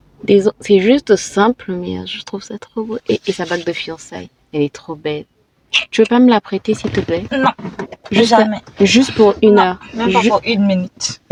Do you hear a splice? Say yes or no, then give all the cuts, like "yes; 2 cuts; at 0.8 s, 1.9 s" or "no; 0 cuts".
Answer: no; 0 cuts